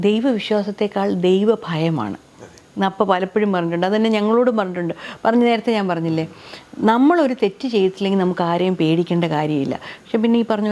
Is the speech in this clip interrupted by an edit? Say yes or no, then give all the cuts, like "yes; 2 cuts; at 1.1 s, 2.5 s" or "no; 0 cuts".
no; 0 cuts